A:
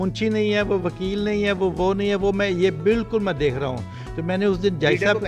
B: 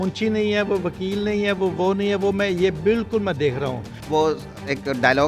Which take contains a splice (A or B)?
B